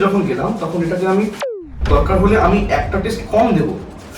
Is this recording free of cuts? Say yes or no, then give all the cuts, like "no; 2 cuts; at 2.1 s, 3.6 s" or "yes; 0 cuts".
no; 1 cut; at 1.7 s